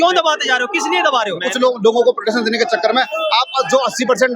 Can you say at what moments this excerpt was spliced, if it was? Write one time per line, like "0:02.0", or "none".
0:01.4